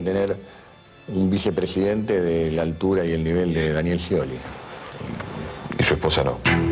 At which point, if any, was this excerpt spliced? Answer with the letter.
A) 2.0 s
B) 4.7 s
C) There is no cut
C